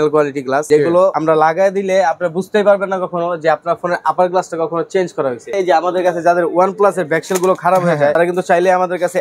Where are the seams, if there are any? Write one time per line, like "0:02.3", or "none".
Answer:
0:00.9
0:05.5
0:08.1